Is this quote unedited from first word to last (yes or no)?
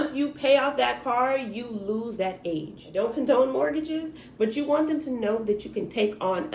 no